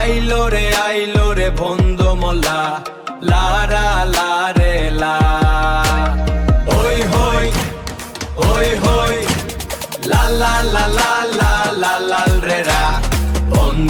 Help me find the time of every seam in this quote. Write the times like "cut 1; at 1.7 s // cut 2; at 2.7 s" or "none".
none